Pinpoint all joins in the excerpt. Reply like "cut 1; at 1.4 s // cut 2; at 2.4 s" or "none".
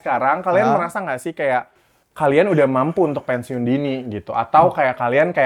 none